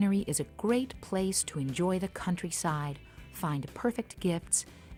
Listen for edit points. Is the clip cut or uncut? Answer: uncut